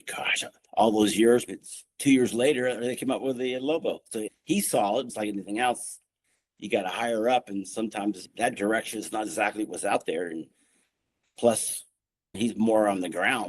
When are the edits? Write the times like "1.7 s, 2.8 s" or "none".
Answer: 1.6 s